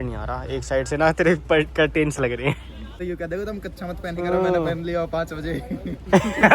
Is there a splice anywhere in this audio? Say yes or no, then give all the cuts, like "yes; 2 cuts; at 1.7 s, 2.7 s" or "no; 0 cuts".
yes; 1 cut; at 3.1 s